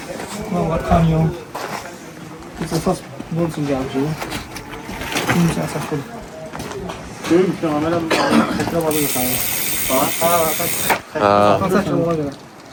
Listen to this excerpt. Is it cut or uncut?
uncut